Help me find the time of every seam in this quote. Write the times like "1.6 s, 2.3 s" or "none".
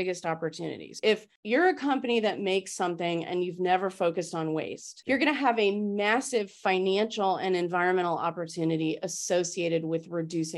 none